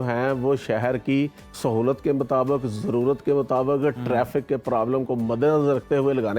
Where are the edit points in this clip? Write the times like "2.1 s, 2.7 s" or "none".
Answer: none